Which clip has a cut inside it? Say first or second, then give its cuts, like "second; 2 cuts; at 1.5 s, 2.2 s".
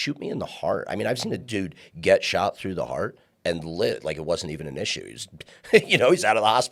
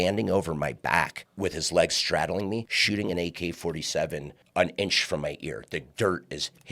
second; 3 cuts; at 1.2 s, 2.7 s, 4.4 s